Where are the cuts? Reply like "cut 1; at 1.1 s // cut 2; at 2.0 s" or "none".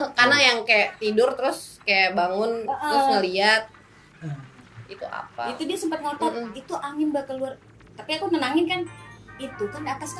none